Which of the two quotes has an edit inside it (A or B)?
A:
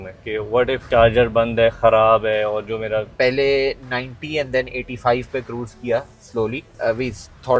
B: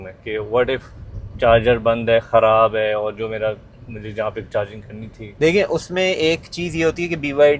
A